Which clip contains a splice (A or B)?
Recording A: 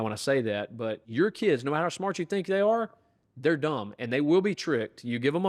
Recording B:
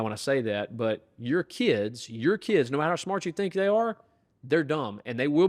A